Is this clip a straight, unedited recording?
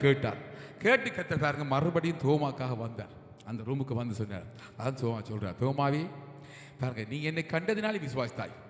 yes; 0 cuts

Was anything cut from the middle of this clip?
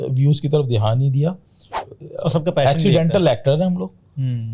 yes; 1 cut; at 1.8 s

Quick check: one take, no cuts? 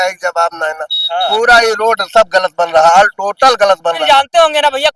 no; 1 cut; at 4.0 s

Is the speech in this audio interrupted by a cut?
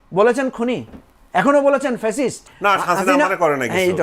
yes; 1 cut; at 2.5 s

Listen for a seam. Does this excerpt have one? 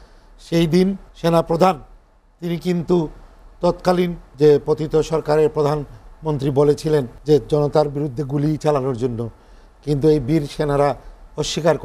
yes; 3 cuts; at 1.1 s, 4.2 s, 7.1 s

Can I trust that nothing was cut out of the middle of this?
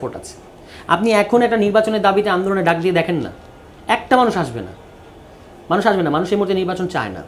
yes; 0 cuts

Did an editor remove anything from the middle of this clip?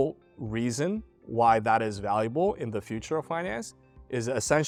no; 0 cuts

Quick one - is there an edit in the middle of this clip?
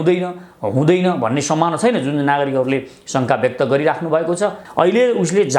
yes; 1 cut; at 4.6 s

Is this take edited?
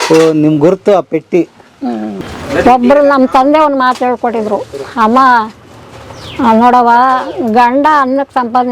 yes; 1 cut; at 2.1 s

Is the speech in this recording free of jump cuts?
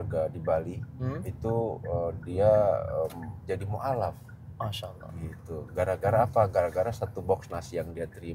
yes; 0 cuts

